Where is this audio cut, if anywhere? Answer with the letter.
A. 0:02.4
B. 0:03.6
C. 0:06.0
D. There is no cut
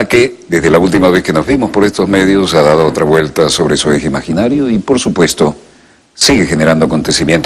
D